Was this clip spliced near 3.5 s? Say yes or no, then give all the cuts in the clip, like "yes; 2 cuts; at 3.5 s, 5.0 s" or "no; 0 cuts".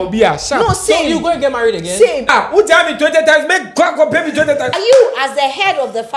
no; 2 cuts; at 2.2 s, 4.8 s